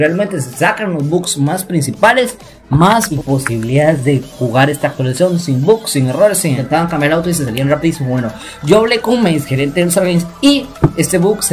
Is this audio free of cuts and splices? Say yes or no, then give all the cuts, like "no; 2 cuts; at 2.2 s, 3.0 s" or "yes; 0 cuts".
no; 2 cuts; at 3.1 s, 6.6 s